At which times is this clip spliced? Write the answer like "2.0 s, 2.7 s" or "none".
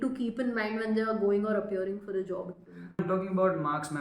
3.0 s